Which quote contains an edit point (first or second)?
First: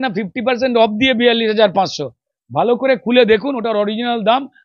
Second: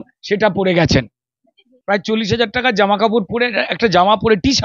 second